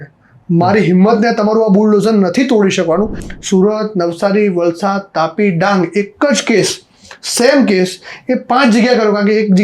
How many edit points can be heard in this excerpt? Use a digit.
1